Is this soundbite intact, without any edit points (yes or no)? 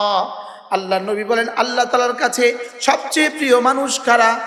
yes